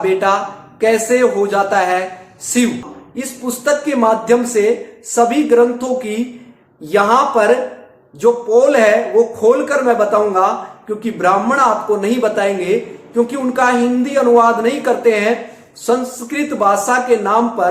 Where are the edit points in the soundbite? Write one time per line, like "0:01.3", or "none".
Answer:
0:02.9